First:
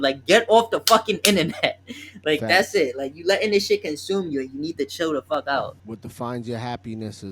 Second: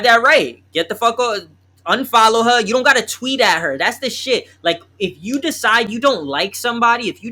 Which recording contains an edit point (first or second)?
first